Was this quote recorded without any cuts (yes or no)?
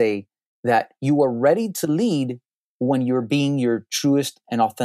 yes